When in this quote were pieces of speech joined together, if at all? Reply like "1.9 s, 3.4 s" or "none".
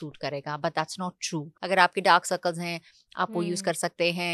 1.5 s